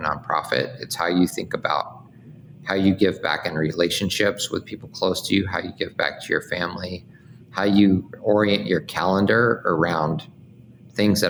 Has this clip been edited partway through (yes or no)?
no